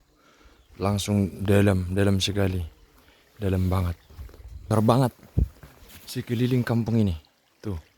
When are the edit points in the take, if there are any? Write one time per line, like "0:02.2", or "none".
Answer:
0:04.6